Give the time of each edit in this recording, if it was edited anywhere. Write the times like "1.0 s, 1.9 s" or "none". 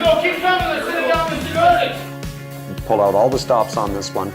2.5 s